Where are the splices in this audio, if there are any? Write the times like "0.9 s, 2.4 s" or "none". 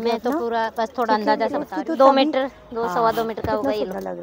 1.7 s